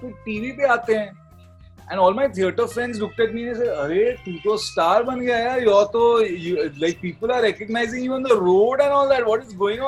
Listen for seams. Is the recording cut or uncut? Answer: uncut